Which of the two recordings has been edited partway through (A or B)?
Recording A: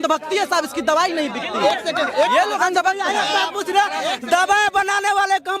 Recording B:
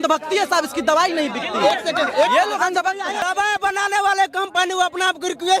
B